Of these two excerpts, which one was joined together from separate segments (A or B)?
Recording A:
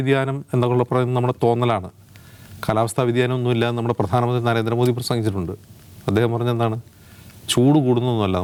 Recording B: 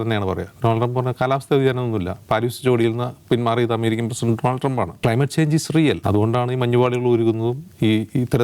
B